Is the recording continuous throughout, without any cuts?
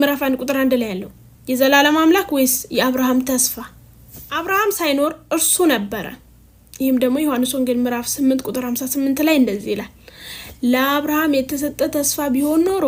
yes; 0 cuts

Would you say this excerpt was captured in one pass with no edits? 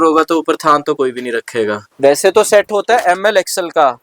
no; 1 cut; at 1.9 s

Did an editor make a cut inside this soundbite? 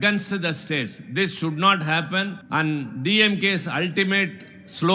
yes; 1 cut; at 2.4 s

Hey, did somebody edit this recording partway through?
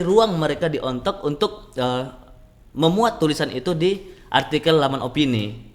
no; 0 cuts

